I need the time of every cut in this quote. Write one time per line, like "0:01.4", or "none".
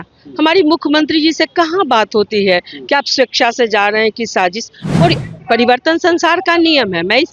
0:05.2